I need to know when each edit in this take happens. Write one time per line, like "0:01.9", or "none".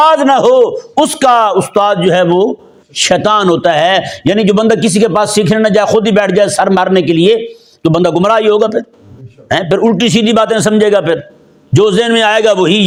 none